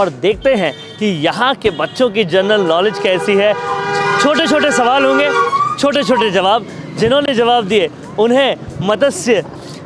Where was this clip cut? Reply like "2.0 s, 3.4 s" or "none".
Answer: none